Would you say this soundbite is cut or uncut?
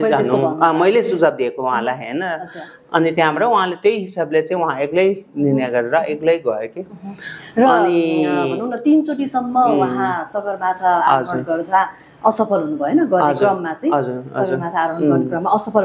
uncut